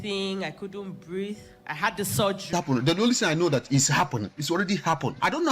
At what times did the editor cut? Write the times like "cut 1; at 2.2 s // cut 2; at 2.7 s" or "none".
cut 1; at 2.5 s